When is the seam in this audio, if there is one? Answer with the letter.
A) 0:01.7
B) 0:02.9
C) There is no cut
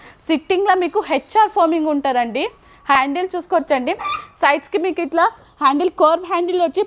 B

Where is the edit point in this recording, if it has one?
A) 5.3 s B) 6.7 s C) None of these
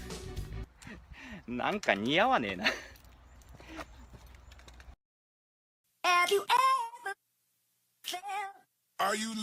B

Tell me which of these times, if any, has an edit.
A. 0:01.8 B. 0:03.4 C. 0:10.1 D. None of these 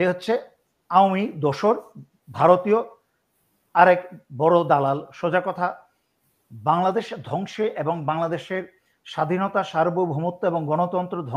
D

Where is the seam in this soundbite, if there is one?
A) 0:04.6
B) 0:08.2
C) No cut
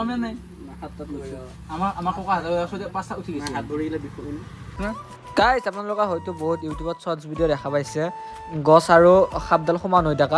A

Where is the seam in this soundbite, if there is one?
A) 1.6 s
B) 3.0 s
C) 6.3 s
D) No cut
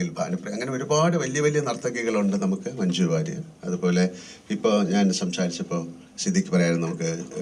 D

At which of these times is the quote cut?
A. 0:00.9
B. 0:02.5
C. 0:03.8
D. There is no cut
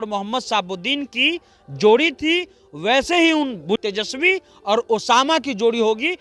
C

